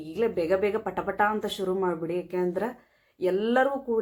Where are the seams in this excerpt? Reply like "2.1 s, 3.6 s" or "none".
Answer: none

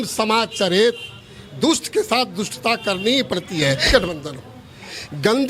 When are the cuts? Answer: 3.9 s

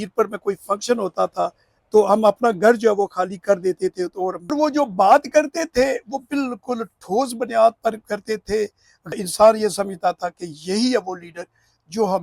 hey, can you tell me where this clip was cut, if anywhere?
4.5 s, 9.1 s

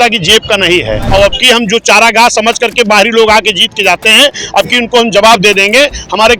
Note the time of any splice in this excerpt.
1.0 s

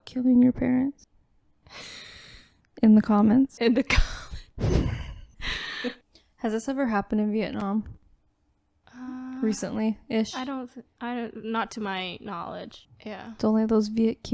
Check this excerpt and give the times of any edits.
6.0 s

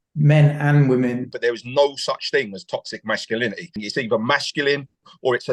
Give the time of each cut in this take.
1.3 s, 3.8 s

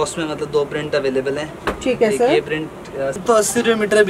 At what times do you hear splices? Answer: 3.2 s

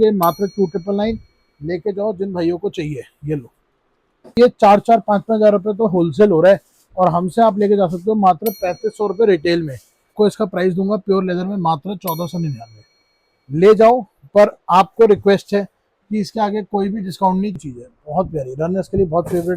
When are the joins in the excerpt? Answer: 4.4 s, 10.1 s, 17.6 s

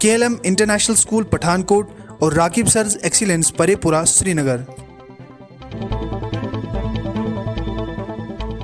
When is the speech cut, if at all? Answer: 5.8 s

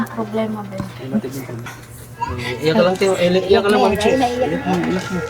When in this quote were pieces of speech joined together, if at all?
1.6 s

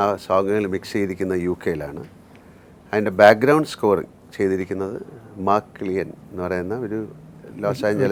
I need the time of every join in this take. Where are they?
none

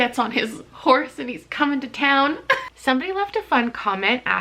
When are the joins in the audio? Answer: 2.7 s

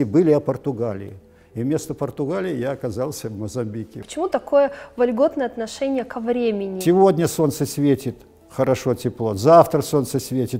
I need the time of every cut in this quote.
4.0 s, 6.7 s

